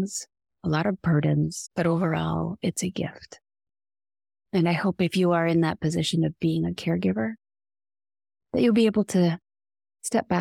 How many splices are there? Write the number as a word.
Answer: one